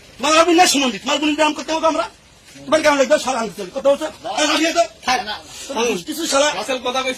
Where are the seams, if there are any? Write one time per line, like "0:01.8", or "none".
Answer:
none